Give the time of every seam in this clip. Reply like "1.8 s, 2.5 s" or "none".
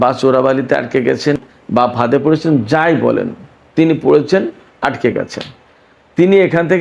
1.4 s

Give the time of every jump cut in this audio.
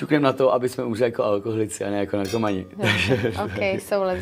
none

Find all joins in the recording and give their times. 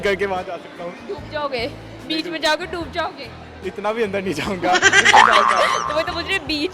none

